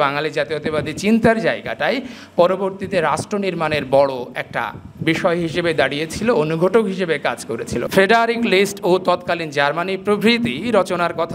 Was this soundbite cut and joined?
yes; 1 cut; at 7.8 s

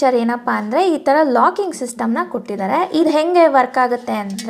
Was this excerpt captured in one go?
yes; 0 cuts

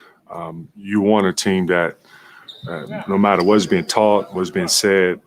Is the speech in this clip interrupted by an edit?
no; 0 cuts

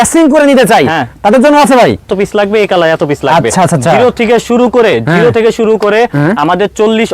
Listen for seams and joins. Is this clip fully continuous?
no; 1 cut; at 2.1 s

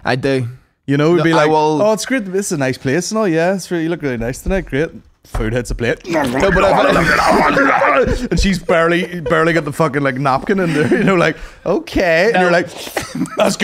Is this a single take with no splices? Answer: yes; 0 cuts

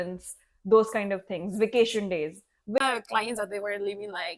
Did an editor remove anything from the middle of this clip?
yes; 1 cut; at 2.8 s

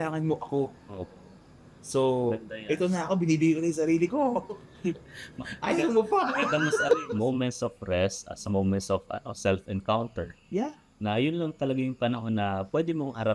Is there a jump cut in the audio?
yes; 1 cut; at 7.0 s

